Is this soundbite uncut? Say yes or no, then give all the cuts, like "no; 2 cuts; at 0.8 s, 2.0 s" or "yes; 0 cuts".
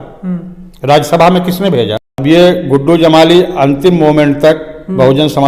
no; 1 cut; at 2.2 s